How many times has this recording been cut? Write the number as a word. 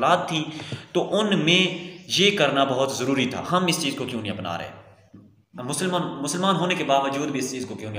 one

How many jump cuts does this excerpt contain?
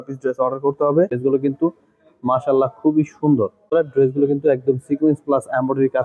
two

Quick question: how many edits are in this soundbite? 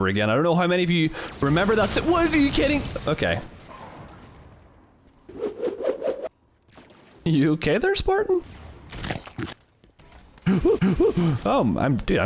one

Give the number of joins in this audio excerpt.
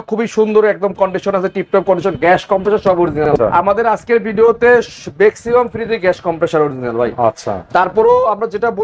one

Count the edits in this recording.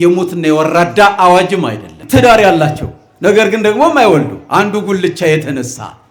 one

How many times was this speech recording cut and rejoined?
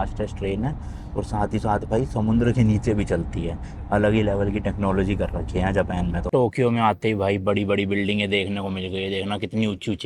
one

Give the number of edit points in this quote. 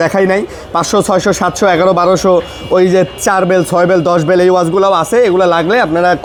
zero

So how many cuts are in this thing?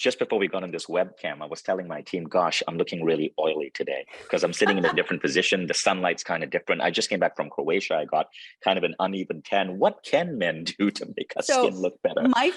zero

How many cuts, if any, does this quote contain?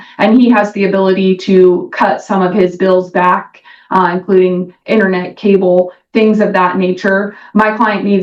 zero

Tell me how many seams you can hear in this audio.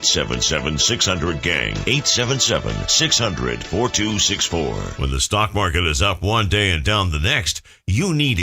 one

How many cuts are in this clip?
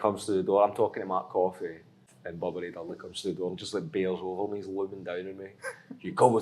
one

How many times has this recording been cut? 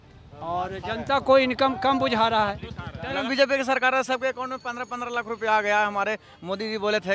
one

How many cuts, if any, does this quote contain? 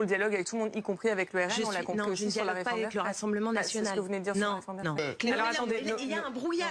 one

